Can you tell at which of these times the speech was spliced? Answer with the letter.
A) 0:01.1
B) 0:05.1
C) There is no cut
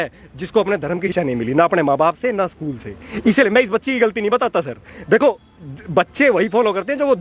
A